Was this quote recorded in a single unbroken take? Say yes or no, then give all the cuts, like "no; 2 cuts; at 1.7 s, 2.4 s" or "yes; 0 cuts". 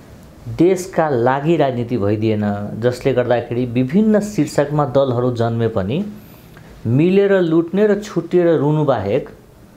yes; 0 cuts